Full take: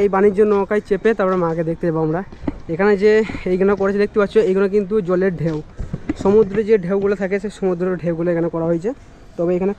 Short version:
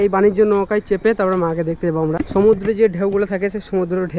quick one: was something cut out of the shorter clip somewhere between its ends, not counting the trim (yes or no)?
yes